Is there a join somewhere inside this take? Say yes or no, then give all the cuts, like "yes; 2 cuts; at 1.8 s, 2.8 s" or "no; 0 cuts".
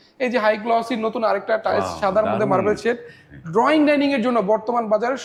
no; 0 cuts